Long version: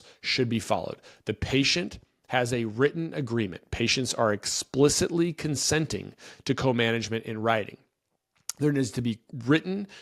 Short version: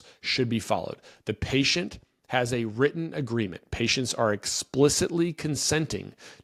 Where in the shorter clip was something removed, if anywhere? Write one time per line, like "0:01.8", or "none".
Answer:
none